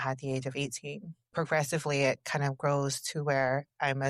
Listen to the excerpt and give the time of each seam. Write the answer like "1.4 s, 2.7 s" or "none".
1.2 s